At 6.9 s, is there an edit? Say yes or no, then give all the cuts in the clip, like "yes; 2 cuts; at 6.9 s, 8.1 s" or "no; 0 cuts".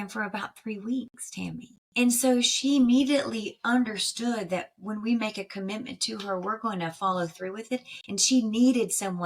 no; 1 cut; at 1.7 s